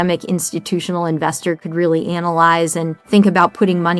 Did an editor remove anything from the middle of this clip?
yes; 1 cut; at 2.9 s

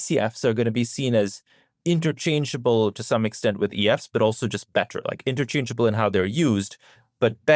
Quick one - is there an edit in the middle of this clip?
no; 0 cuts

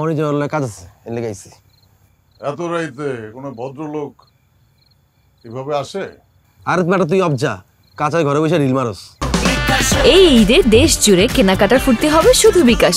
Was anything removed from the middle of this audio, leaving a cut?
no; 0 cuts

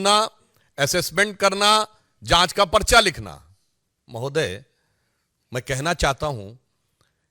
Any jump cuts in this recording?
no; 0 cuts

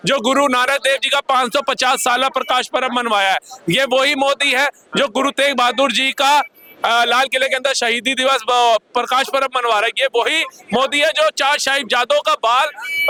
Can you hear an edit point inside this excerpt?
no; 0 cuts

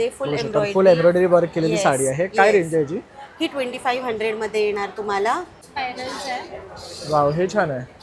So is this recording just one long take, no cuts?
no; 1 cut; at 5.6 s

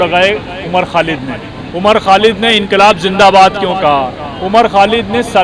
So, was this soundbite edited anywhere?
no; 0 cuts

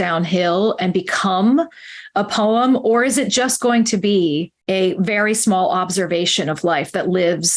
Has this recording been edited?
yes; 1 cut; at 4.5 s

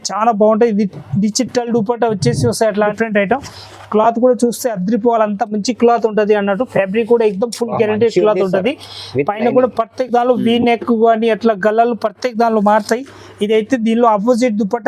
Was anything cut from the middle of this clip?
yes; 1 cut; at 2.9 s

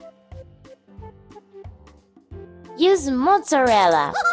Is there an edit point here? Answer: yes; 1 cut; at 1.6 s

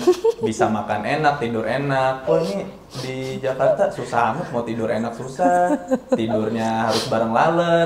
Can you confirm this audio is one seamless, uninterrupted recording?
yes; 0 cuts

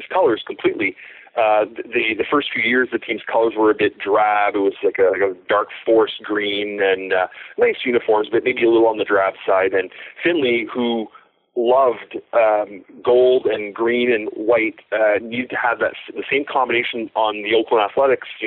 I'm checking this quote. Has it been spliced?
no; 0 cuts

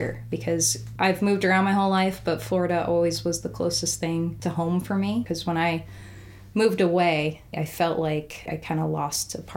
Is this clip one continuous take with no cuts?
no; 4 cuts; at 4.4 s, 5.2 s, 7.6 s, 8.5 s

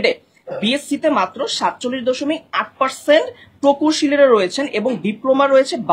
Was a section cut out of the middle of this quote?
no; 0 cuts

